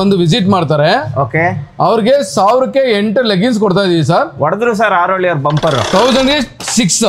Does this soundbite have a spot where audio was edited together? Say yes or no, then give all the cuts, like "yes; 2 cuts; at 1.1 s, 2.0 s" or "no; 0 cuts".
yes; 1 cut; at 5.8 s